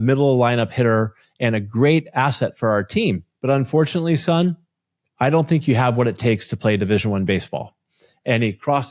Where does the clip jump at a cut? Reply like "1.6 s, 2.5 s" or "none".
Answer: 3.3 s